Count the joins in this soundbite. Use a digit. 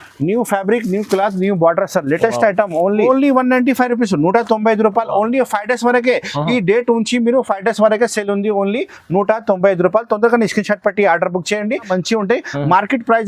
2